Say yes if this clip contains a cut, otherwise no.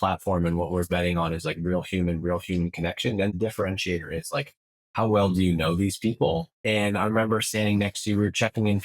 yes